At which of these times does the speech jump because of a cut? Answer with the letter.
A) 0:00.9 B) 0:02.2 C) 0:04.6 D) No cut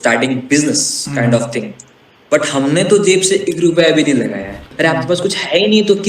C